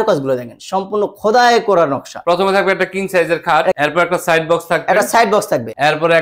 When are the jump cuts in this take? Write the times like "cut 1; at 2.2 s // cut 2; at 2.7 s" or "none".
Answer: cut 1; at 2.2 s // cut 2; at 3.8 s